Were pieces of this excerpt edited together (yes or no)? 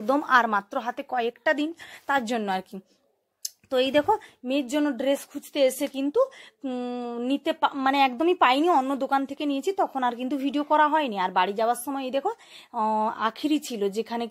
no